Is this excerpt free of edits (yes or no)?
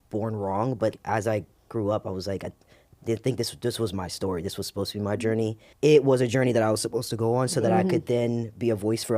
no